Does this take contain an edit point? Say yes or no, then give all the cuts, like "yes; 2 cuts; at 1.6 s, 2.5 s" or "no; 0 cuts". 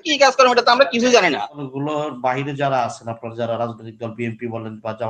yes; 1 cut; at 1.6 s